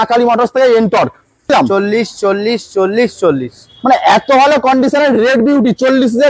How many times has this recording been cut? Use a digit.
1